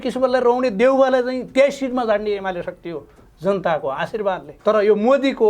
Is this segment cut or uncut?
cut